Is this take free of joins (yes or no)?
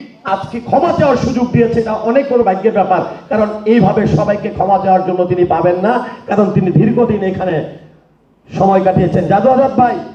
yes